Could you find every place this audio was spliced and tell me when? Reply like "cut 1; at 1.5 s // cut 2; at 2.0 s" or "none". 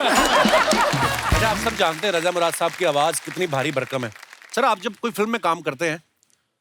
cut 1; at 1.4 s

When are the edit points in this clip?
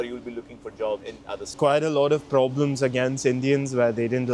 cut 1; at 1.4 s

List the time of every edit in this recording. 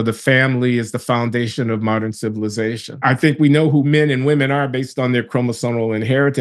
cut 1; at 2.9 s

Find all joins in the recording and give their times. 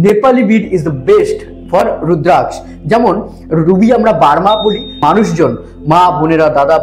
cut 1; at 4.9 s

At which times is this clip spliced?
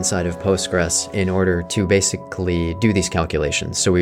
none

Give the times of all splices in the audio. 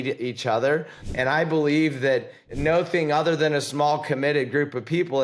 cut 1; at 1.0 s // cut 2; at 2.4 s

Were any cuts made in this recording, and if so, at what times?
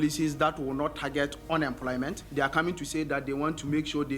cut 1; at 2.2 s

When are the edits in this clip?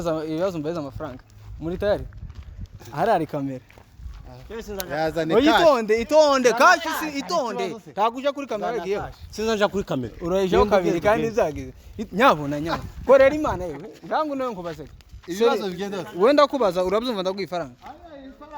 none

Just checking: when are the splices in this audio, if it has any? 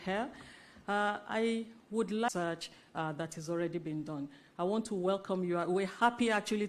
cut 1; at 2.3 s

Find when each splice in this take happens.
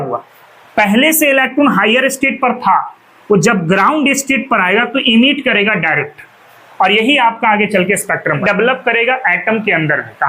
cut 1; at 8.4 s

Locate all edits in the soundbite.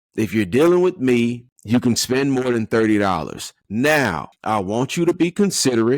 cut 1; at 1.5 s // cut 2; at 4.3 s

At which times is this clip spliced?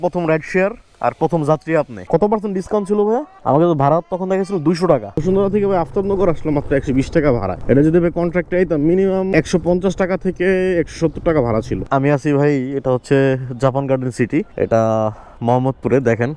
cut 1; at 2.1 s // cut 2; at 5.2 s // cut 3; at 11.8 s

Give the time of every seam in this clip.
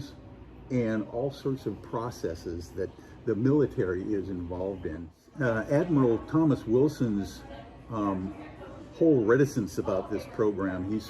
cut 1; at 5.3 s

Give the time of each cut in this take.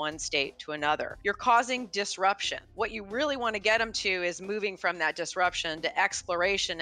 cut 1; at 1.1 s // cut 2; at 2.6 s

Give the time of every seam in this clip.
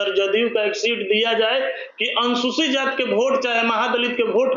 none

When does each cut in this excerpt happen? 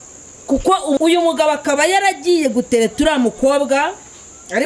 cut 1; at 1.0 s

